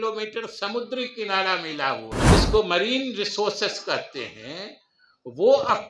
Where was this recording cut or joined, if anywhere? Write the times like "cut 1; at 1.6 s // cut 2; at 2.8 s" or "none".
cut 1; at 2.2 s